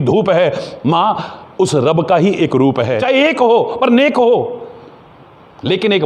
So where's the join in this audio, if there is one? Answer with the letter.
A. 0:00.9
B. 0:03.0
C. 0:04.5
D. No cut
B